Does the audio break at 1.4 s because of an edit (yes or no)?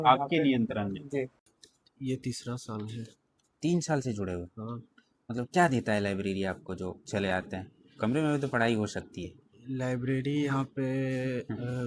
yes